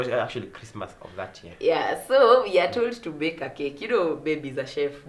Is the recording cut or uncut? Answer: uncut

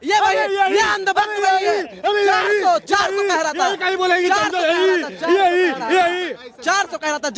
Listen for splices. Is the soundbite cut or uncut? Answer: uncut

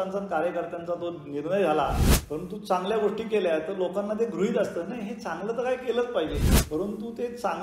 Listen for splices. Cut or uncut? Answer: cut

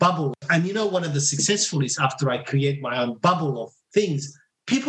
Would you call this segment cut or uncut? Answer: cut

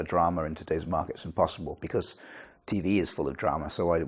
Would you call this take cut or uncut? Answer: uncut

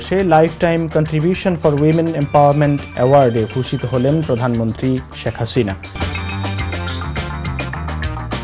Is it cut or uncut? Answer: uncut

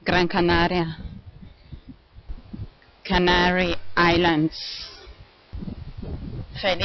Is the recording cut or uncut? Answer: cut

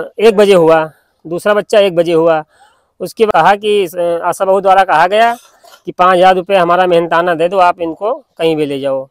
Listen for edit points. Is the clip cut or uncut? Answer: cut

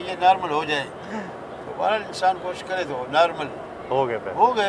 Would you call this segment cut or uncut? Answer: uncut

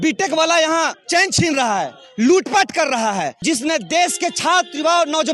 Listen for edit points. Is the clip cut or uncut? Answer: cut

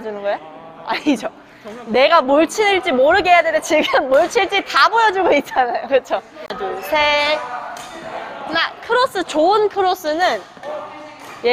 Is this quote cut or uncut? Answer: cut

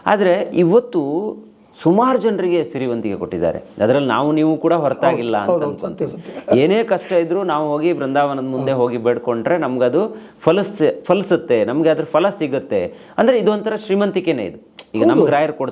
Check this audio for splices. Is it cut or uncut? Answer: uncut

